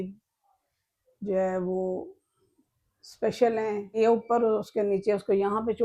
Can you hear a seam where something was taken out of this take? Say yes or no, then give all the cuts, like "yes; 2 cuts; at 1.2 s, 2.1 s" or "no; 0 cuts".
yes; 1 cut; at 3.9 s